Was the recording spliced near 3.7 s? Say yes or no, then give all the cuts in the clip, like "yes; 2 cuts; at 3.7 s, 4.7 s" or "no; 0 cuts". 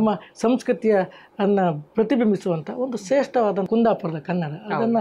yes; 1 cut; at 3.7 s